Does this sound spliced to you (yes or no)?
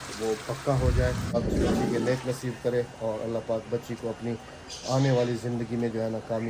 yes